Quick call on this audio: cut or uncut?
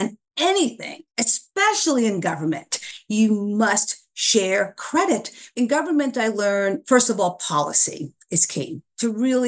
cut